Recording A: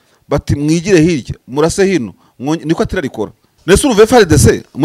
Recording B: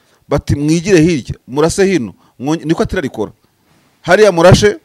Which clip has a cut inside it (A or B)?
A